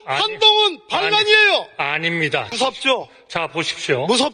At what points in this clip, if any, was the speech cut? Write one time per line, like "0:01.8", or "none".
0:02.5